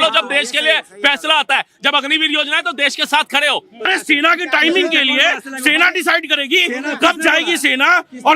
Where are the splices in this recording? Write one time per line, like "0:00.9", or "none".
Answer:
0:03.9